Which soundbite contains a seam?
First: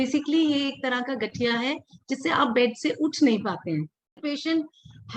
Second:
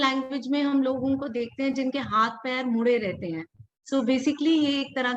first; 1 cut; at 4.3 s

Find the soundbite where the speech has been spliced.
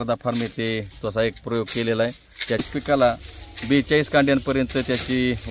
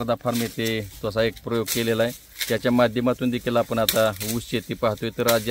first; 1 cut; at 2.6 s

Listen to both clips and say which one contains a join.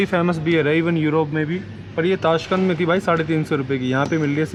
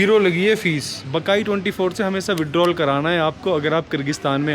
second; 1 cut; at 1.0 s

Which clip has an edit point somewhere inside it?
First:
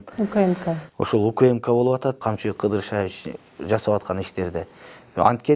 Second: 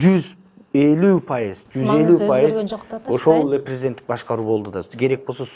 first; 1 cut; at 2.2 s

